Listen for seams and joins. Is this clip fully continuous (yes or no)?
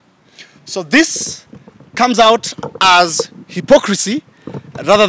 yes